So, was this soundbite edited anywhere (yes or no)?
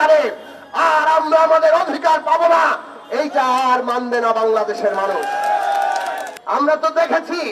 yes